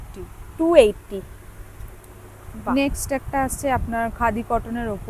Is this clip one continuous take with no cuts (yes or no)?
yes